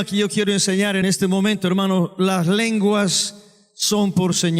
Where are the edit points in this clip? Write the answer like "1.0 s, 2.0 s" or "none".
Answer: 1.0 s